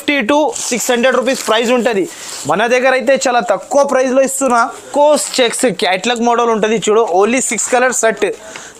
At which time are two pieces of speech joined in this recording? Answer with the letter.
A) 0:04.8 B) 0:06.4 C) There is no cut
A